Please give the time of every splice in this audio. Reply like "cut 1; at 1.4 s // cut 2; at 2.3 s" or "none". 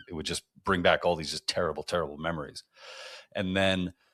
none

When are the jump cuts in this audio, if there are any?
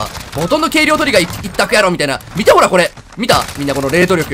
none

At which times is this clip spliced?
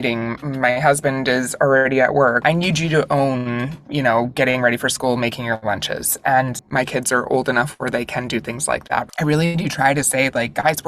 cut 1; at 2.4 s // cut 2; at 6.6 s // cut 3; at 9.1 s

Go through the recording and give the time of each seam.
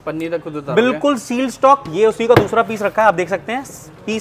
none

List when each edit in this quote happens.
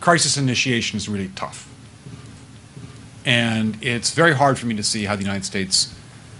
cut 1; at 2.0 s

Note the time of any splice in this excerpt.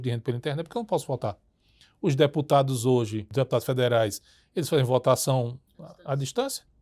cut 1; at 3.2 s

